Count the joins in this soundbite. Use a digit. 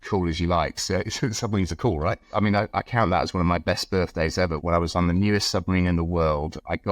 1